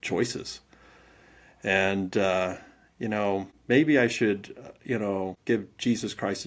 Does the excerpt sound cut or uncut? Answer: cut